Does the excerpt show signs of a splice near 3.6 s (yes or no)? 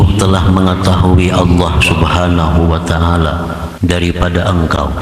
yes